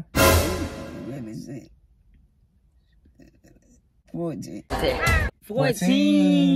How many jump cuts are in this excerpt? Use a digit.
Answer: 2